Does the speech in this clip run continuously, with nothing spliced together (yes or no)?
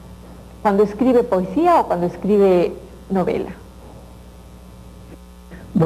yes